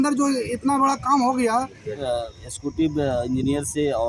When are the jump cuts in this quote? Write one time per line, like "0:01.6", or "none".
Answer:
0:02.0